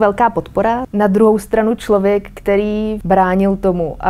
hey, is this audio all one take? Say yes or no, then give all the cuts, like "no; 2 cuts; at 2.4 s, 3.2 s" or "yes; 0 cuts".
no; 2 cuts; at 0.9 s, 3.0 s